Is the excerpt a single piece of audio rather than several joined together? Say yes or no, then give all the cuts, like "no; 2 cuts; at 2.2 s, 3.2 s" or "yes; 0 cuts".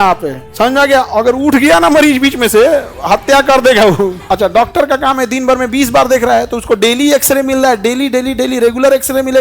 no; 1 cut; at 4.2 s